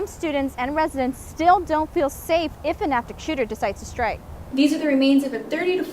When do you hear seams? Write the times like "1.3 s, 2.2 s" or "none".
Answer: 4.3 s